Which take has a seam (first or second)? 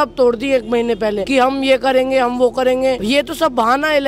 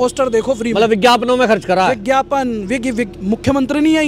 first